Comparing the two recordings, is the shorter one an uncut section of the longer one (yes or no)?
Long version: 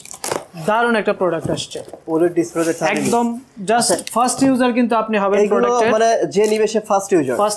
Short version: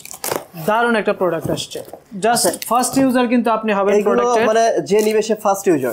no